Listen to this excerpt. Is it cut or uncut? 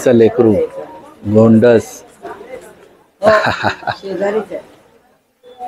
uncut